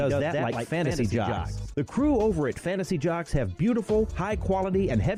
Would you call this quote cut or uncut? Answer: uncut